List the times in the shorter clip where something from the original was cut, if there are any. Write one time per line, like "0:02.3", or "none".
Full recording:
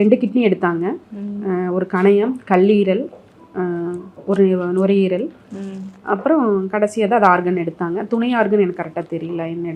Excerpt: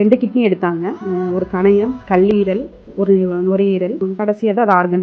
0:01.0
0:02.8
0:04.0